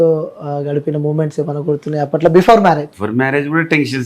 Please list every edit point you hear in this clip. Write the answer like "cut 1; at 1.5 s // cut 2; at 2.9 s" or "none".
cut 1; at 2.9 s